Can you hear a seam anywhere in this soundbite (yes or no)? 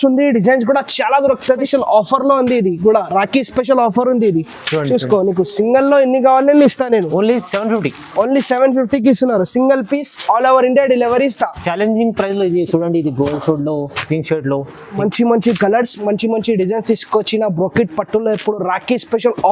yes